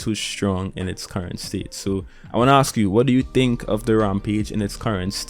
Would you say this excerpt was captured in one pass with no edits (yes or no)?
yes